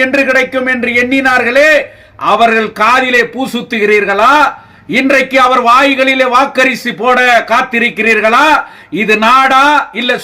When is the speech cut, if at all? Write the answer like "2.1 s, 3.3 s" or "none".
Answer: none